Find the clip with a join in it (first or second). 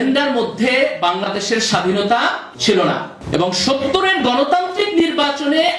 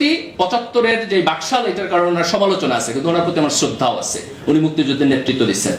first